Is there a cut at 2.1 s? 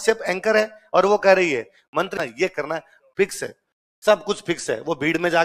yes; 1 cut; at 2.1 s

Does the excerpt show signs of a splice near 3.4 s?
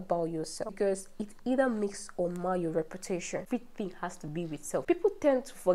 yes; 1 cut; at 3.4 s

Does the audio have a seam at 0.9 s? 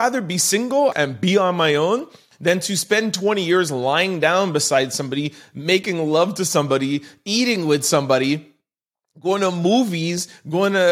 yes; 1 cut; at 0.9 s

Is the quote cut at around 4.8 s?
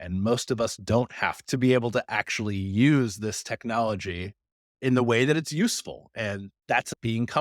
yes; 2 cuts; at 4.8 s, 6.7 s

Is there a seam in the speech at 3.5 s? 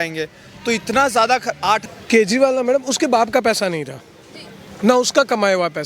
no; 1 cut; at 1.8 s

